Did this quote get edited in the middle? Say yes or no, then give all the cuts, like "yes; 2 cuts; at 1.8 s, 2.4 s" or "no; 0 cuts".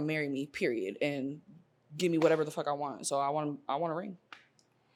no; 0 cuts